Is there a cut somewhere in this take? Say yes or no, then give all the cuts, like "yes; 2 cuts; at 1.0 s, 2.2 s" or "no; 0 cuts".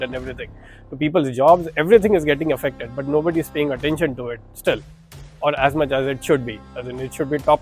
no; 0 cuts